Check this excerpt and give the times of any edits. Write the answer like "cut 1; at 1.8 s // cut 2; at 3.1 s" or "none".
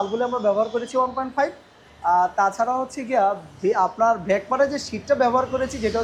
none